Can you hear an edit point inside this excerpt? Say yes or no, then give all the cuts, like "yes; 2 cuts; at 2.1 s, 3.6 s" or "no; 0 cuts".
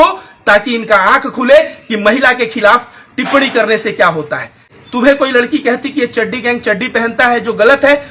yes; 1 cut; at 4.7 s